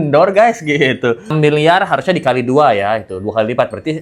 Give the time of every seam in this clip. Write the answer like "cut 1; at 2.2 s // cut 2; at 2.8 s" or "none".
cut 1; at 1.3 s